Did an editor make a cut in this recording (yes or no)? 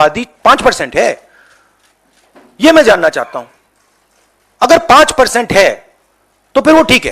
no